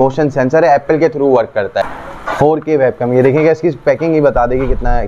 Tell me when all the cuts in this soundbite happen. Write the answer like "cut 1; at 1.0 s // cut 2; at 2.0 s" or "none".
cut 1; at 1.8 s